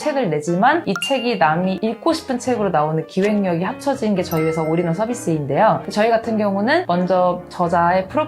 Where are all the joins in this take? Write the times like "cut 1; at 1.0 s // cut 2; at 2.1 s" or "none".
none